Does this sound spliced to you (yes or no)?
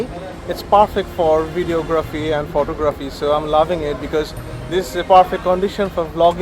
no